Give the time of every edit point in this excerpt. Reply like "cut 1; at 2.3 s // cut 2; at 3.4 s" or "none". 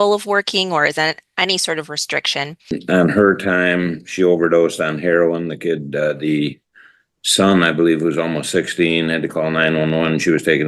cut 1; at 2.8 s

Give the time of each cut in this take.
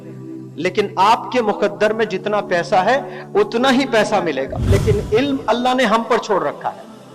cut 1; at 4.7 s

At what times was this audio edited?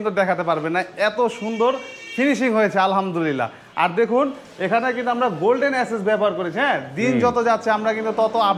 none

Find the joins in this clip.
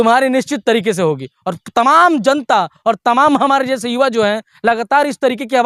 none

